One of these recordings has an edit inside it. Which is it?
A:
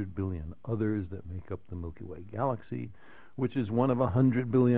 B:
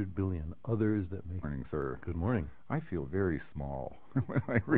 A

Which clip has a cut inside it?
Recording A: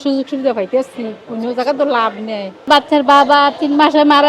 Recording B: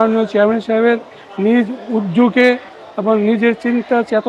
A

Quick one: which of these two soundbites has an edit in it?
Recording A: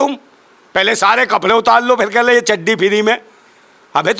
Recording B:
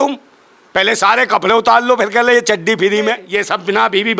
B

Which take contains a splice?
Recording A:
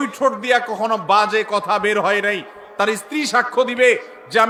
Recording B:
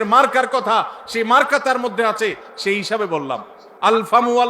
B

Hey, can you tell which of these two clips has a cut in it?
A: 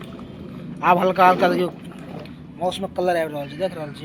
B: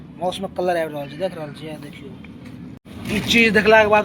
B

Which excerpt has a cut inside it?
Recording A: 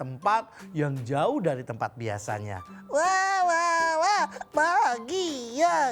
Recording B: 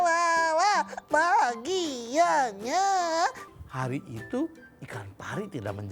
B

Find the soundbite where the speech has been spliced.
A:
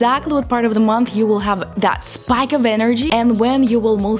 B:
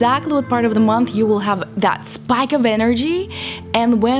A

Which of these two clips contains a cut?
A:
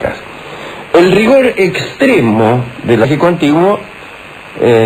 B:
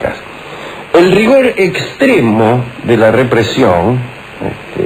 B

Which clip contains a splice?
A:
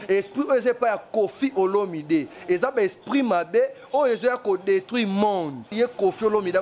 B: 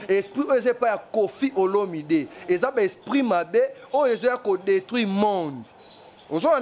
A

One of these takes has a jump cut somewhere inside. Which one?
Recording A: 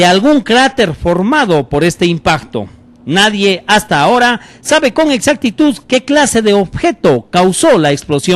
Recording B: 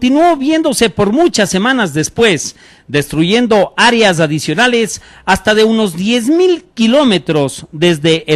B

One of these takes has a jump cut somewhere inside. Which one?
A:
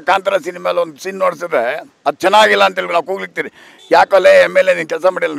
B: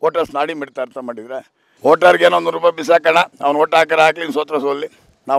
B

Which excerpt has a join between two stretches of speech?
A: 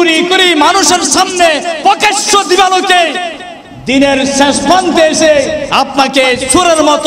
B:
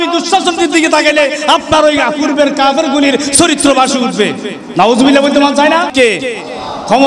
B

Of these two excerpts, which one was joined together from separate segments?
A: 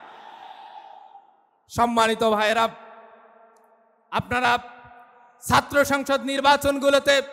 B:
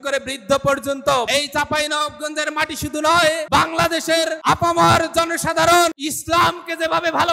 B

